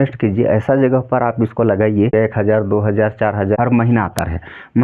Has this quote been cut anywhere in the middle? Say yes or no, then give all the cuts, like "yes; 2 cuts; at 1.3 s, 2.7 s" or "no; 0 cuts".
yes; 2 cuts; at 2.1 s, 3.6 s